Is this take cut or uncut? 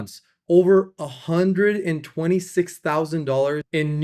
uncut